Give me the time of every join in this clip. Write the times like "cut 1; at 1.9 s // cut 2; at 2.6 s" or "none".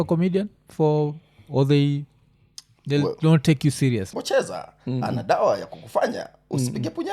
cut 1; at 4.1 s